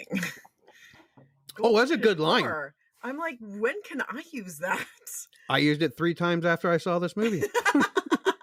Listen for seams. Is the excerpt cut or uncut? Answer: uncut